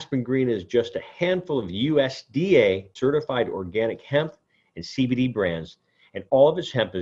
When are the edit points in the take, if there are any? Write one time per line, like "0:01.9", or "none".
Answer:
0:02.9